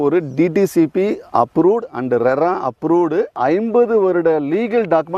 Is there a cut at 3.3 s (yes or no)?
yes